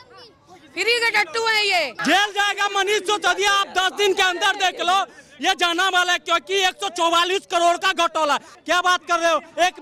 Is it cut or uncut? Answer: cut